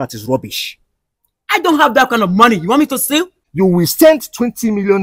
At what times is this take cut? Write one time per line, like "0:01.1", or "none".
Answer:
0:03.4